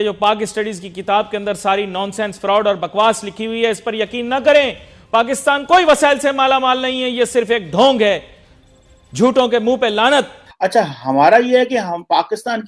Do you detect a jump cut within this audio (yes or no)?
yes